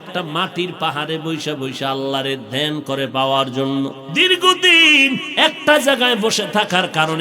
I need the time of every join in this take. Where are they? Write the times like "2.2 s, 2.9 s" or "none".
4.0 s